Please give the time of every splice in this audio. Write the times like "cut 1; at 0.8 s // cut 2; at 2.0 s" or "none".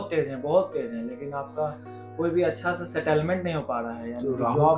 none